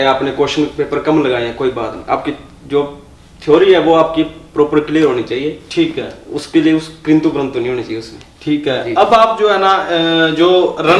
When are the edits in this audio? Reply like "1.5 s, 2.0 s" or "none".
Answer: none